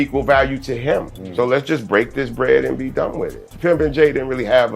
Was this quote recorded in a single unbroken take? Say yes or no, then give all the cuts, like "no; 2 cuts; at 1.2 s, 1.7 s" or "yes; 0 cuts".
no; 2 cuts; at 1.2 s, 3.5 s